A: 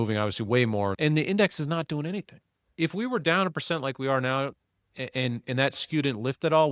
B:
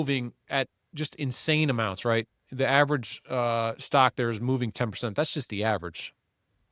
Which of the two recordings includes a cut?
A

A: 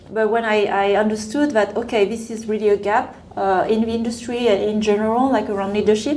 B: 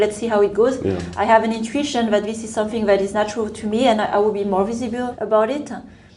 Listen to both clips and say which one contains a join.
B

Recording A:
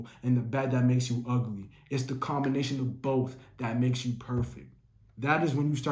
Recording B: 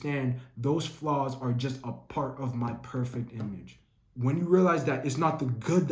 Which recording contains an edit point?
B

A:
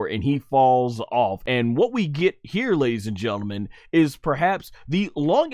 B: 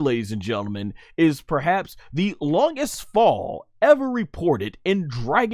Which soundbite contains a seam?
A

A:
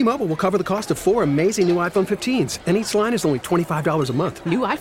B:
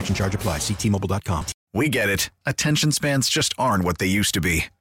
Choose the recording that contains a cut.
B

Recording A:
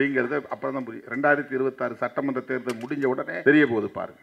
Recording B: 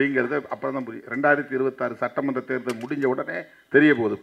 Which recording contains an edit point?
A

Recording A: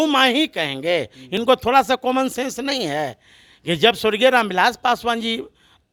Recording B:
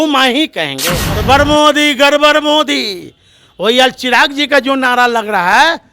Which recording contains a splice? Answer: B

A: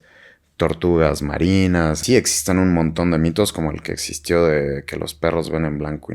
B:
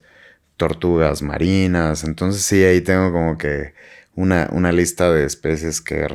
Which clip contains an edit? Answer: A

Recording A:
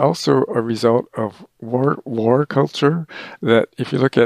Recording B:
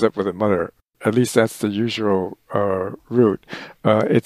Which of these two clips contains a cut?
B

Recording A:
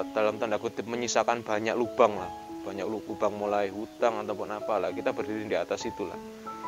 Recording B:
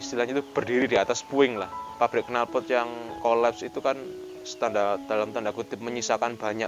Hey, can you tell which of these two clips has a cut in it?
B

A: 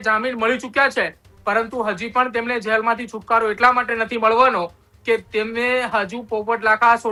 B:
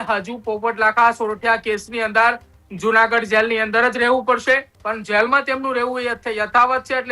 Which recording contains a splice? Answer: B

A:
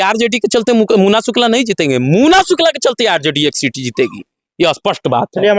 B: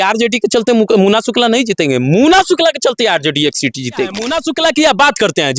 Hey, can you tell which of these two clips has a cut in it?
B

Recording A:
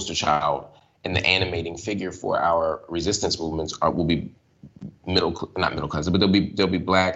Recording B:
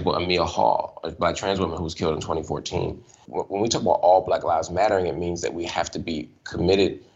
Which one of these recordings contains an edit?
B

